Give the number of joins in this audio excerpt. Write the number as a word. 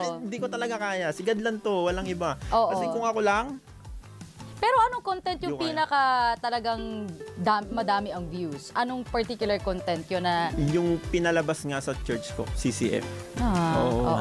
zero